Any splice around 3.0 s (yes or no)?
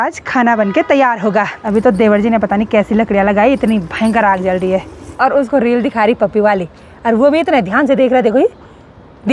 no